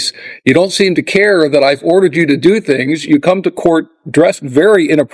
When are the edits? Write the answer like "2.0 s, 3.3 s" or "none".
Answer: none